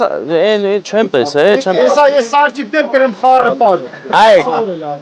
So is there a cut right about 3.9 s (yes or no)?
yes